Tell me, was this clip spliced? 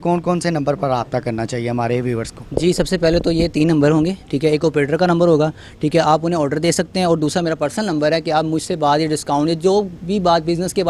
no; 0 cuts

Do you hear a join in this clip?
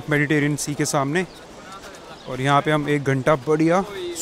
no; 0 cuts

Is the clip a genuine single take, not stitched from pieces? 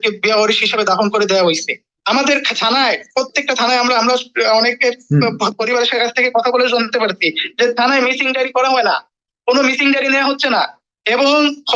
no; 1 cut; at 1.9 s

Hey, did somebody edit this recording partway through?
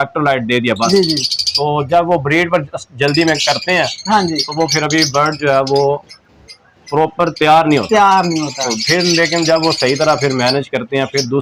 no; 0 cuts

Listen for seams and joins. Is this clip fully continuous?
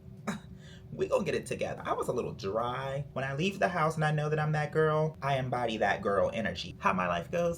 no; 3 cuts; at 1.7 s, 3.0 s, 6.7 s

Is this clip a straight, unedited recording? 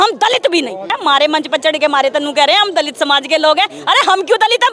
no; 1 cut; at 0.9 s

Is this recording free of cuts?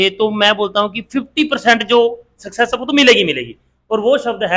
yes; 0 cuts

